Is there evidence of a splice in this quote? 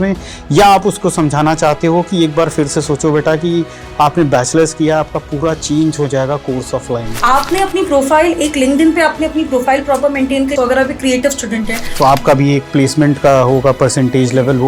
yes; 3 cuts; at 7.1 s, 10.5 s, 11.8 s

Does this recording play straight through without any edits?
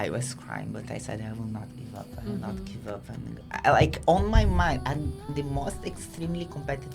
yes; 0 cuts

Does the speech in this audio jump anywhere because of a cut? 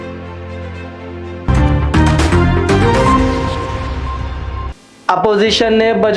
yes; 1 cut; at 1.4 s

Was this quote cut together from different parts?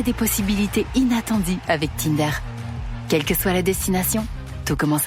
no; 0 cuts

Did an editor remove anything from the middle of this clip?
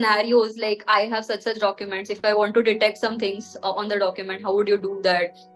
no; 0 cuts

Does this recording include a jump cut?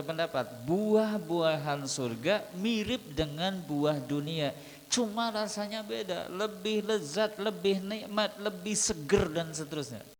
no; 0 cuts

